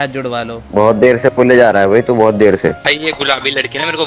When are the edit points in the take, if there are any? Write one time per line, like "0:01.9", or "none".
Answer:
0:02.8